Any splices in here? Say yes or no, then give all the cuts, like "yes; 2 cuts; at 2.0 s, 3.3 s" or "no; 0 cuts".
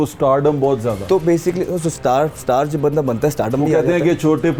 no; 0 cuts